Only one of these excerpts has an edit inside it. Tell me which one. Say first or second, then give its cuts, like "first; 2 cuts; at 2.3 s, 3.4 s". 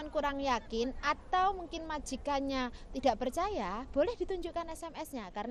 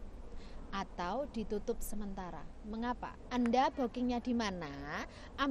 second; 1 cut; at 3.2 s